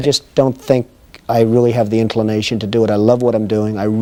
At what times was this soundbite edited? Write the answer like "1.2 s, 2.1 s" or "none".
none